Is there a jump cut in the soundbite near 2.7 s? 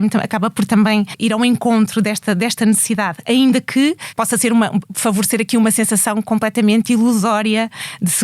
no; 3 cuts; at 1.1 s, 4.1 s, 4.9 s

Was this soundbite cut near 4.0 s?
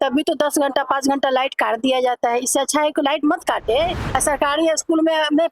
yes; 1 cut; at 4.0 s

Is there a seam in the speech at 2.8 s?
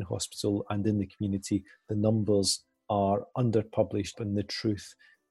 no; 1 cut; at 4.1 s

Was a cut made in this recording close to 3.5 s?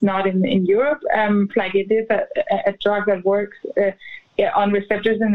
no; 1 cut; at 1.5 s

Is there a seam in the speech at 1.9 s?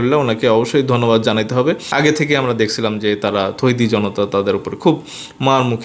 yes; 1 cut; at 1.9 s

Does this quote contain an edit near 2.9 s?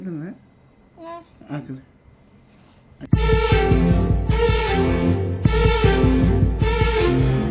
yes; 1 cut; at 2.9 s

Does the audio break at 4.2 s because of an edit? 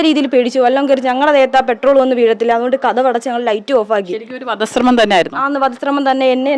no; 0 cuts

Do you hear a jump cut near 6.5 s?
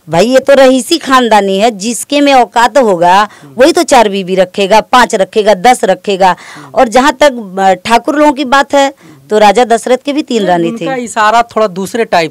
no; 0 cuts

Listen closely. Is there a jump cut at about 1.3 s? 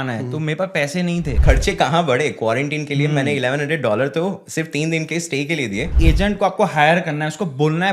yes; 2 cuts; at 1.3 s, 5.9 s

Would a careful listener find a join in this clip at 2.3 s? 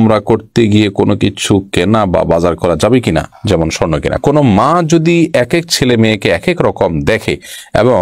no; 1 cut; at 4.2 s

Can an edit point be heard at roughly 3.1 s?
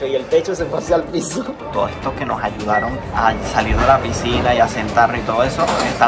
no; 1 cut; at 1.7 s

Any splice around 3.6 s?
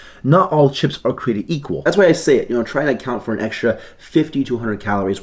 no; 1 cut; at 1.8 s

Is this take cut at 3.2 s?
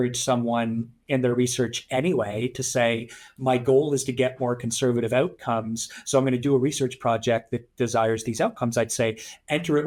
no; 0 cuts

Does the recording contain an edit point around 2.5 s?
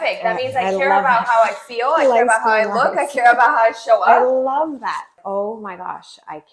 no; 1 cut; at 5.2 s

